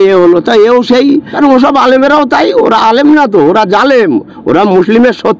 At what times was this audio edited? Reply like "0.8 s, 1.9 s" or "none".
1.3 s

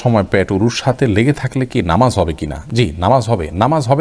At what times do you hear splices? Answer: none

